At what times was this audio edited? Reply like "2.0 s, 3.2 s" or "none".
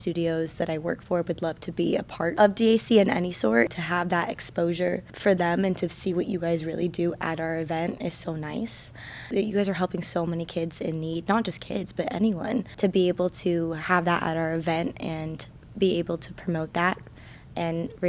2.3 s, 3.7 s, 5.1 s, 9.3 s, 12.7 s